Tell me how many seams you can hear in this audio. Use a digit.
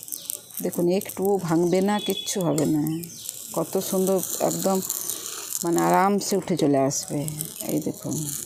0